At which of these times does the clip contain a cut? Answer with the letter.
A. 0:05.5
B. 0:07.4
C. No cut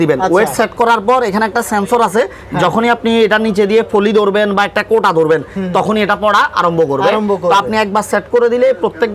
C